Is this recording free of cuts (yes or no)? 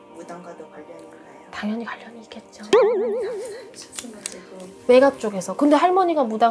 yes